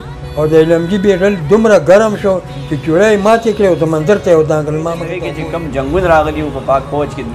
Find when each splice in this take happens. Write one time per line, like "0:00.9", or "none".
0:05.2